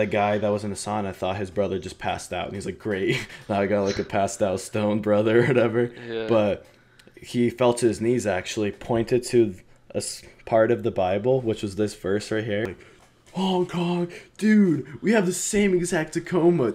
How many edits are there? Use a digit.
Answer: 1